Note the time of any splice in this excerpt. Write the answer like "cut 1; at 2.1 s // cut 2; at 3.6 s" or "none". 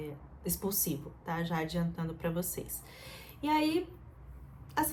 none

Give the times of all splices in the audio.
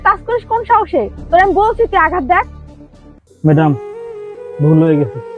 cut 1; at 1.2 s

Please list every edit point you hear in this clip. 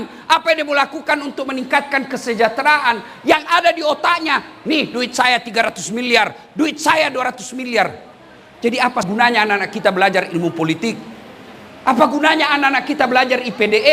cut 1; at 9.1 s

